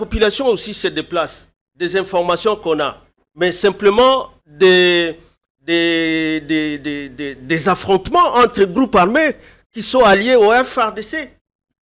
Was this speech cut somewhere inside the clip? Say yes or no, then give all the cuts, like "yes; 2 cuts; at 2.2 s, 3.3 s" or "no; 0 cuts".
no; 0 cuts